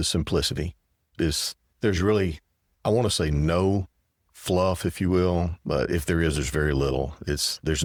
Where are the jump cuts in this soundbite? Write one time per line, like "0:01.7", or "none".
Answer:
none